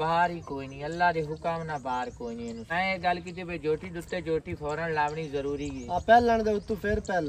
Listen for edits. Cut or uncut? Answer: cut